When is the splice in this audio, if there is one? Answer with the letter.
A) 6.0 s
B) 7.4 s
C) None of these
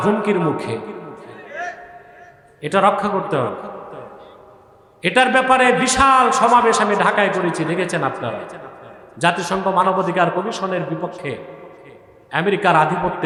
C